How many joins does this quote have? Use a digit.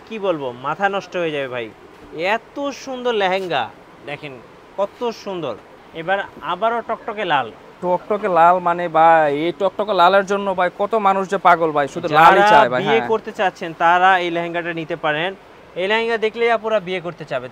1